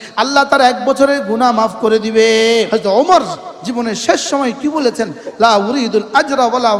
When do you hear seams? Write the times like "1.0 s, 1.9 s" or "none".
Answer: 2.7 s